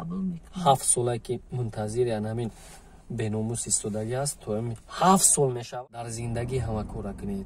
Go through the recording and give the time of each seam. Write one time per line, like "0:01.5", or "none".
0:05.6